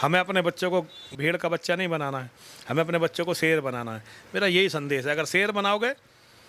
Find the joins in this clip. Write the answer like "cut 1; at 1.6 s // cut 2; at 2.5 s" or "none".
none